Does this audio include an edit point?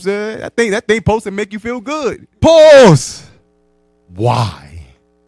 yes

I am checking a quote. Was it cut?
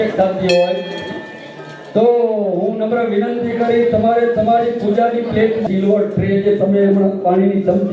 yes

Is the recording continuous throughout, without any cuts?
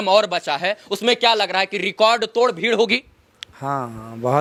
yes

